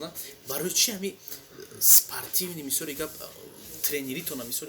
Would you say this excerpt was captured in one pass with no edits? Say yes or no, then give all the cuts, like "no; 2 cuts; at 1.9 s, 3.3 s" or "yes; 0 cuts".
yes; 0 cuts